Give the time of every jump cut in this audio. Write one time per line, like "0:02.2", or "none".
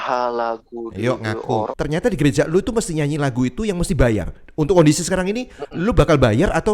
0:01.7